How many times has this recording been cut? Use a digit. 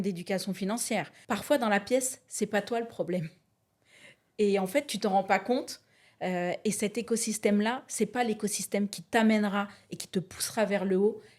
1